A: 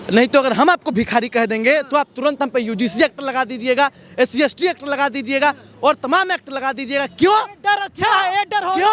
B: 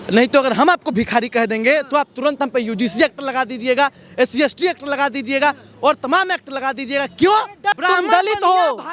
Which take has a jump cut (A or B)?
B